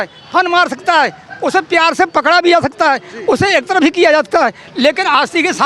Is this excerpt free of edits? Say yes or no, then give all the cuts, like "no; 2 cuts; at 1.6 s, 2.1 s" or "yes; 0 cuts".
yes; 0 cuts